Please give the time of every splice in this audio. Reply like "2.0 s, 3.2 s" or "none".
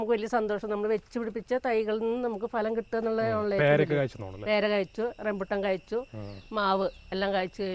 none